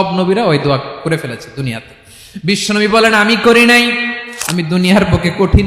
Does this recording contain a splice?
yes; 1 cut; at 4.2 s

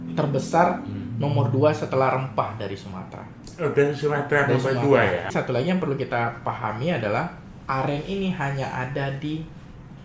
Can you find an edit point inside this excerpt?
yes; 1 cut; at 5.3 s

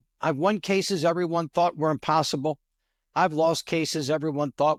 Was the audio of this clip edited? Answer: no; 0 cuts

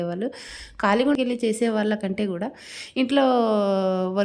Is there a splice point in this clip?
yes; 1 cut; at 1.2 s

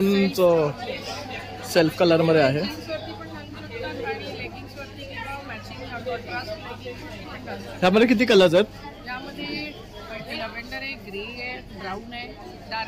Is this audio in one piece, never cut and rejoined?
yes; 0 cuts

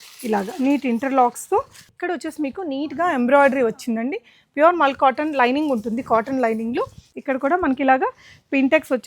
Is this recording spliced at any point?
yes; 2 cuts; at 1.9 s, 7.0 s

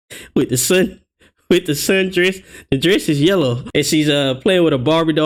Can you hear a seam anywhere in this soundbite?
no; 0 cuts

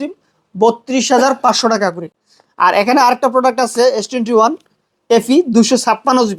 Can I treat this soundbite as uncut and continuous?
yes; 0 cuts

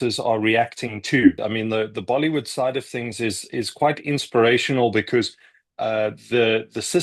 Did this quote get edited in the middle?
yes; 1 cut; at 1.4 s

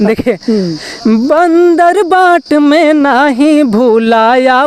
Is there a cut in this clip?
no; 0 cuts

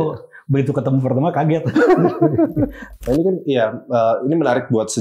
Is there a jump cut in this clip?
yes; 1 cut; at 2.8 s

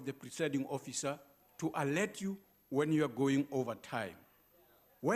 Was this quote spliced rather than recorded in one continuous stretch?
no; 0 cuts

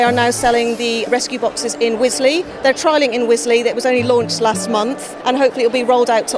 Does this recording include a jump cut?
yes; 2 cuts; at 1.1 s, 5.1 s

